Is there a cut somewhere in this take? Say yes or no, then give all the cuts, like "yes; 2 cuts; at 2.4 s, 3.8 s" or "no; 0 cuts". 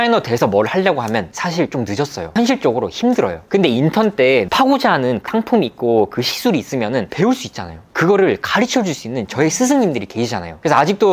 no; 0 cuts